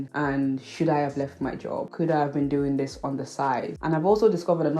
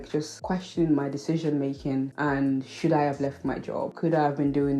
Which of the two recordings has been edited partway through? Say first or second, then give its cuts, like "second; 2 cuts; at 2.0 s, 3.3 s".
first; 1 cut; at 3.7 s